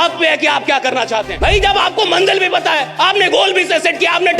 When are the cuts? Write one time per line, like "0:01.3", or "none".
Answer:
0:01.3